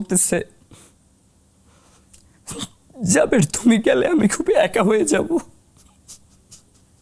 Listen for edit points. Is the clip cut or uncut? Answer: uncut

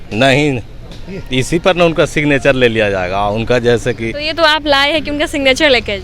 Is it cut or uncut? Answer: cut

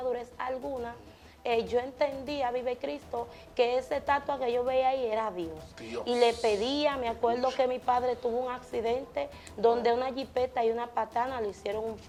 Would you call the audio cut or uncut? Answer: uncut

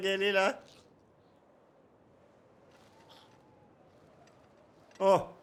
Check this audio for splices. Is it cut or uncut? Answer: uncut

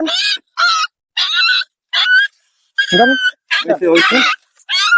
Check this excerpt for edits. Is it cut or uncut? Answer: uncut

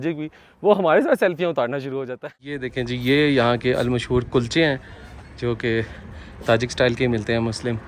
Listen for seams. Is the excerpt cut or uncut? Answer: cut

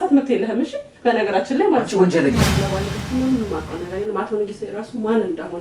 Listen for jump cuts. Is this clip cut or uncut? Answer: cut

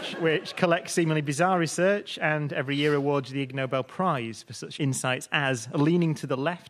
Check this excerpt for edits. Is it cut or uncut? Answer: cut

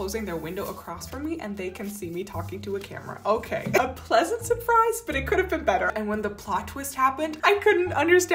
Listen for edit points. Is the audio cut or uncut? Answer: cut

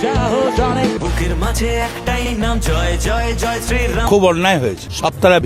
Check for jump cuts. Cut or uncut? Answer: uncut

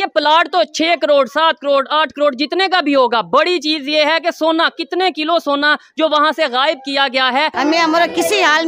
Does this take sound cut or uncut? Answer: cut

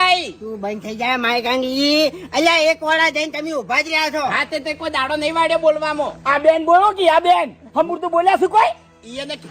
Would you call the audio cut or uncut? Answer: cut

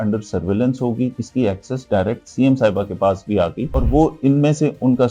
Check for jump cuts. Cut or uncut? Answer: cut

